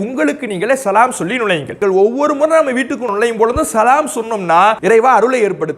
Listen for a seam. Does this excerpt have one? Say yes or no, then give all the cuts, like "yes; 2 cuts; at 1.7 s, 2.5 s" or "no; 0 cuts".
yes; 3 cuts; at 1.7 s, 3.1 s, 4.8 s